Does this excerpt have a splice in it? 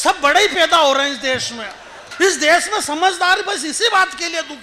yes; 1 cut; at 2.1 s

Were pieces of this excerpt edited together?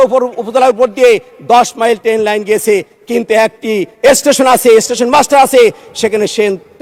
no; 0 cuts

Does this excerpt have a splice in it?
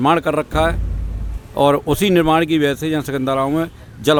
no; 0 cuts

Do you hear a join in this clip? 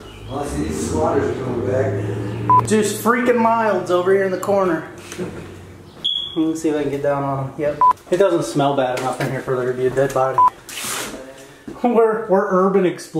yes; 3 cuts; at 2.6 s, 7.9 s, 10.6 s

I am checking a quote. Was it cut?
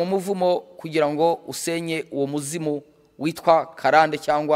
no; 0 cuts

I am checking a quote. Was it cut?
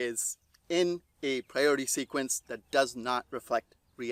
no; 0 cuts

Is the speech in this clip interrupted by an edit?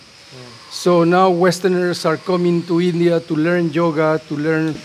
no; 0 cuts

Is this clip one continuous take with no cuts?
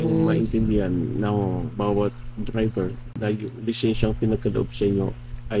no; 1 cut; at 3.1 s

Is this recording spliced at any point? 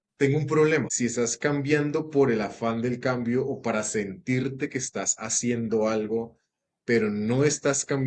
yes; 1 cut; at 0.9 s

